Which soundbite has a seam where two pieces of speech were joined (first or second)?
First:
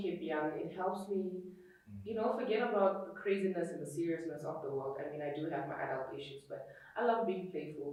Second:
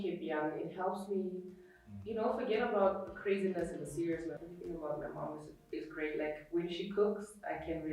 second